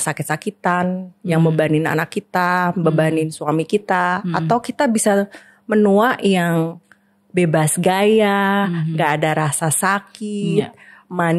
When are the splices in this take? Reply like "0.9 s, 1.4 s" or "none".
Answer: none